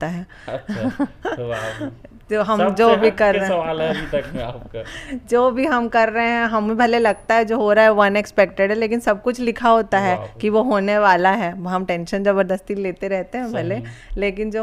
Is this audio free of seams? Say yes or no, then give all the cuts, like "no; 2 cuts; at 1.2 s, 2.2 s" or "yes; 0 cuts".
yes; 0 cuts